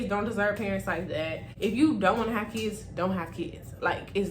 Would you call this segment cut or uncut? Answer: cut